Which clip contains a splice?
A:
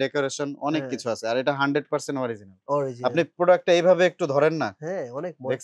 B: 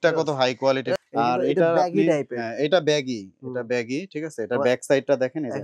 B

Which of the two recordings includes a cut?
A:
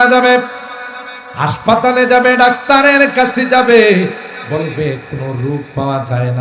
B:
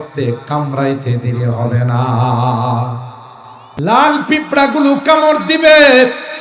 B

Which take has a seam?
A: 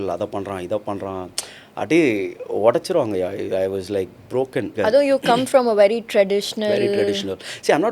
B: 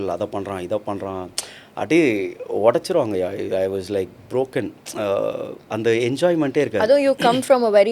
A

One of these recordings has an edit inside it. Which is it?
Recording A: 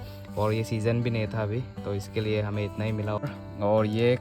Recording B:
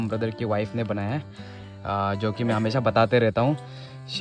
A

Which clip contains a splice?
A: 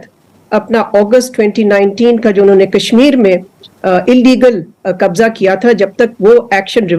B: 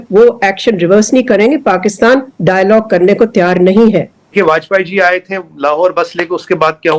B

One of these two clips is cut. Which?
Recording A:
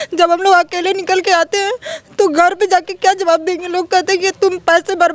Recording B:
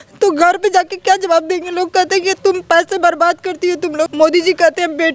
B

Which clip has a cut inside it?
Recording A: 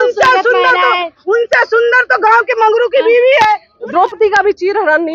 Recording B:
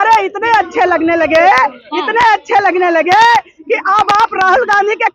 A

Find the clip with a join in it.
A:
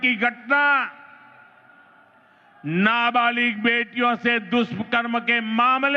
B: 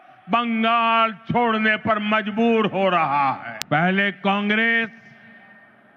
B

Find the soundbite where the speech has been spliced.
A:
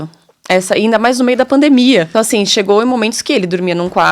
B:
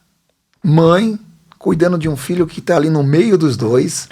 A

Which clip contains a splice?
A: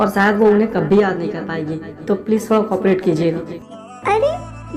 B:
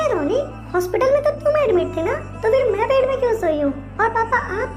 A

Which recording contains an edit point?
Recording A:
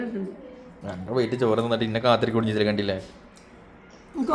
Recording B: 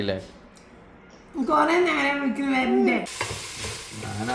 B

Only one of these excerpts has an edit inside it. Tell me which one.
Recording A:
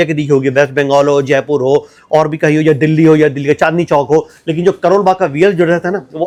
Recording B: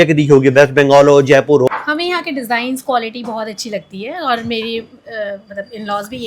B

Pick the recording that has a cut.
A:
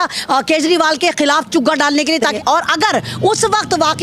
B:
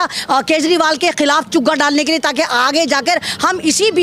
A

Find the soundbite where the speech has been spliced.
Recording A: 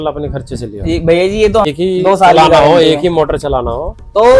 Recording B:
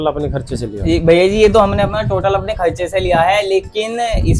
A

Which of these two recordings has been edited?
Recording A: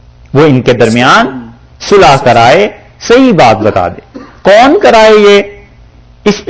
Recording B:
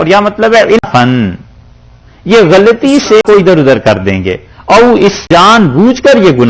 B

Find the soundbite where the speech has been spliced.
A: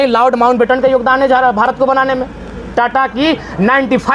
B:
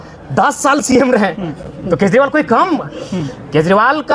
A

